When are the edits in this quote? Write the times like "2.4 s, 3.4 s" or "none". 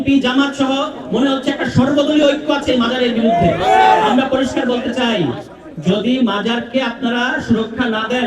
none